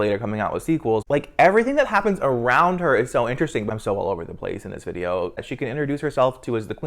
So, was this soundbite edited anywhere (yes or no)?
yes